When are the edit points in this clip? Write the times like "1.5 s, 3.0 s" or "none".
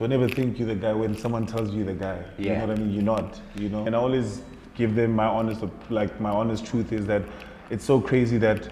3.9 s